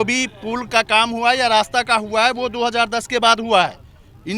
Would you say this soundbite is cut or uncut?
uncut